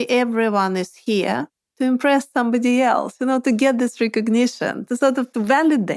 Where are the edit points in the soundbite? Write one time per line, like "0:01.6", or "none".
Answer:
0:01.6